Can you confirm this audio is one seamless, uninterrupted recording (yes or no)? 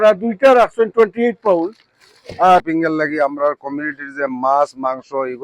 no